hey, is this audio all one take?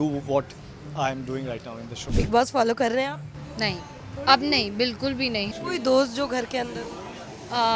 no; 2 cuts; at 2.2 s, 5.5 s

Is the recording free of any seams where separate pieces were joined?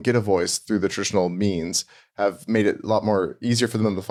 yes; 0 cuts

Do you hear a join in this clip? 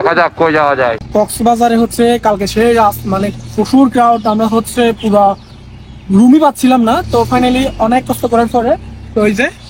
yes; 1 cut; at 1.0 s

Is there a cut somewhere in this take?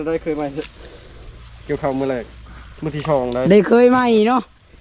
no; 0 cuts

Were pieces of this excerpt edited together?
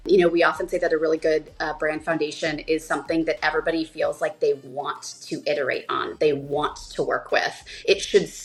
no; 0 cuts

